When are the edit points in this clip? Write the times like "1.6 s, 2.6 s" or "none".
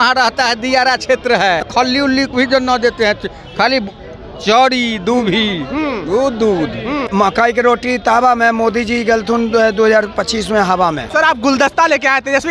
1.7 s, 7.1 s, 11.1 s